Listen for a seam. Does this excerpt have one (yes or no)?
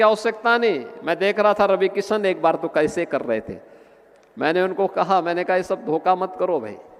no